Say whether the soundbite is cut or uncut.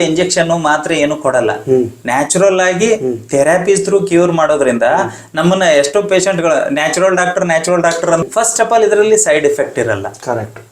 cut